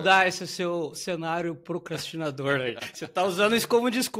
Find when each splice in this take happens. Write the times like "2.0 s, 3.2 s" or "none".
2.9 s

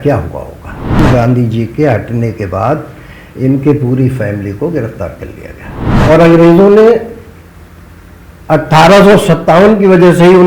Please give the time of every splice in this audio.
1.0 s, 5.8 s

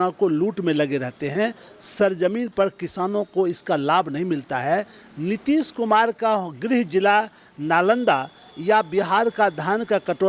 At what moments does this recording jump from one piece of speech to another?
none

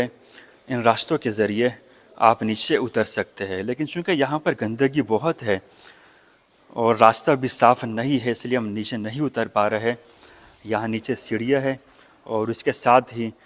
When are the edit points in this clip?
none

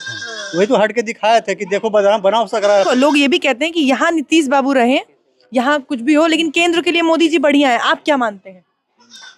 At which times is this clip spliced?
2.9 s

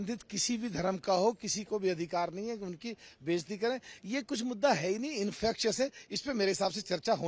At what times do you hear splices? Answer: none

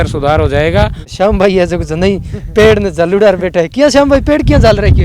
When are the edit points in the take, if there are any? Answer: 1.0 s

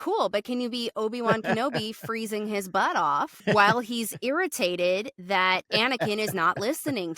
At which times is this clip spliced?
3.4 s

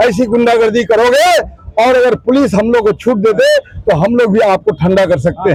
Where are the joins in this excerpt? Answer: none

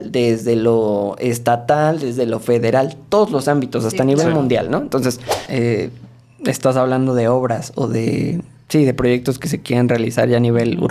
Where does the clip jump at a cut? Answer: 5.4 s

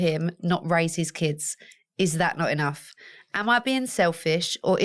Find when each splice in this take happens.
none

